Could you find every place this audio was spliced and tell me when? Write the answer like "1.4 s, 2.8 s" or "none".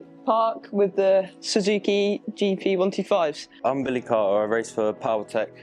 3.6 s